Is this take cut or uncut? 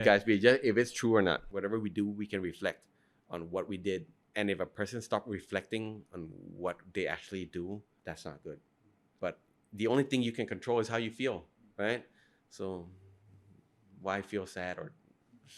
cut